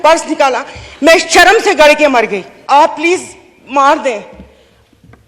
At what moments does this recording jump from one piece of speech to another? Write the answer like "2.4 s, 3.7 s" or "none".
2.5 s